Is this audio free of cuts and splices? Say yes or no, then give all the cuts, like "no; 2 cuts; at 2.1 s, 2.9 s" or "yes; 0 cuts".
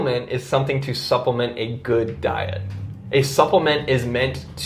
yes; 0 cuts